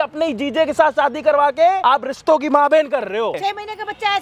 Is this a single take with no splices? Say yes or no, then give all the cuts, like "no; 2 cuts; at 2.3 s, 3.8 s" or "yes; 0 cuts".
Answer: no; 2 cuts; at 1.8 s, 3.4 s